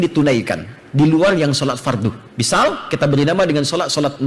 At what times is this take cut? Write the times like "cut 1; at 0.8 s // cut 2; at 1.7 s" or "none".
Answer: cut 1; at 2.3 s

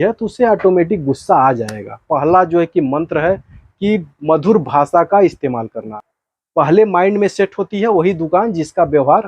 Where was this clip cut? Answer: cut 1; at 2.0 s // cut 2; at 6.0 s

